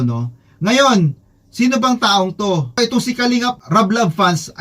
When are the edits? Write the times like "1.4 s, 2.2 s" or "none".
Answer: 2.7 s